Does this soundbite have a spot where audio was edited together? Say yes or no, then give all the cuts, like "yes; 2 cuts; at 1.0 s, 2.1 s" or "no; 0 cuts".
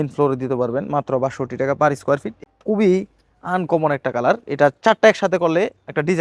yes; 1 cut; at 2.3 s